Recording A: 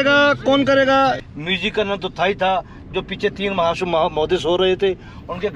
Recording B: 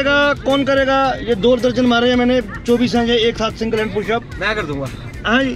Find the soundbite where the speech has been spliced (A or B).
A